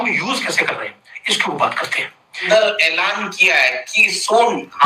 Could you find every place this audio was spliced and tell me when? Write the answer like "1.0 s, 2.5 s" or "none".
2.5 s